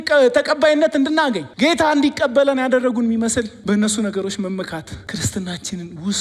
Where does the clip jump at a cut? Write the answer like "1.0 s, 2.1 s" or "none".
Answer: 1.5 s, 3.5 s, 5.0 s